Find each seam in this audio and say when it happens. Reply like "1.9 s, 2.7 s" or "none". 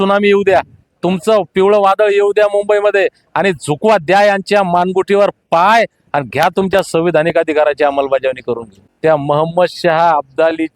8.9 s